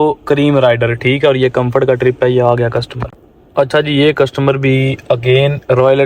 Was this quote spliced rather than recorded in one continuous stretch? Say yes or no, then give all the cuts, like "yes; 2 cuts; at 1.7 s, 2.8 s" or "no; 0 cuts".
no; 0 cuts